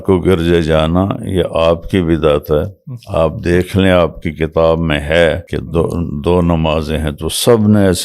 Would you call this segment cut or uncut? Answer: cut